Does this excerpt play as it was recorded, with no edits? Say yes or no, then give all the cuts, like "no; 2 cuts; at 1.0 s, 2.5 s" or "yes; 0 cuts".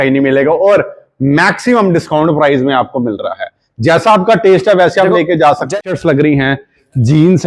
no; 1 cut; at 5.8 s